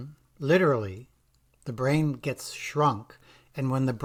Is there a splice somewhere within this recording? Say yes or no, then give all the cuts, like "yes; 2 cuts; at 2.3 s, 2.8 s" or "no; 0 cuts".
no; 0 cuts